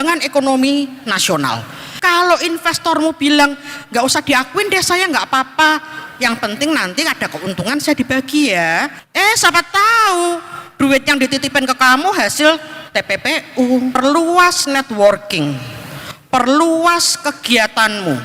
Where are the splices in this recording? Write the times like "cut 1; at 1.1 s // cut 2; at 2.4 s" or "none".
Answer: cut 1; at 1.8 s // cut 2; at 9.0 s // cut 3; at 14.0 s